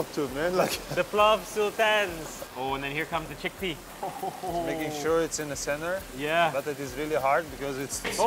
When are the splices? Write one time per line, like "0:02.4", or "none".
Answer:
none